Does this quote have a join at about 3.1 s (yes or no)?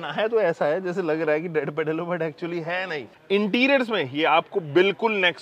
yes